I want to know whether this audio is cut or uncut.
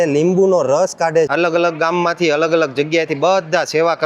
cut